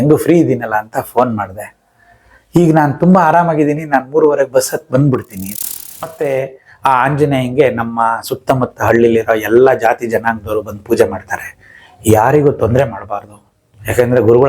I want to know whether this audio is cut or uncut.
cut